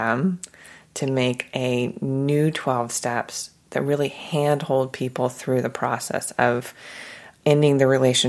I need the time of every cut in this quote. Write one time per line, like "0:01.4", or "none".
0:07.4